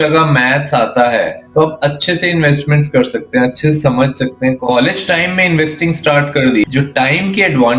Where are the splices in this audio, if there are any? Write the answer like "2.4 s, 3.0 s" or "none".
1.4 s, 4.6 s, 6.6 s